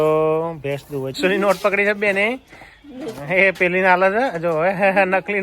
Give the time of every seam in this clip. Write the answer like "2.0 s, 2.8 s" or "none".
1.2 s